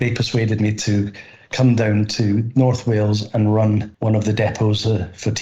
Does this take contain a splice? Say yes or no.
yes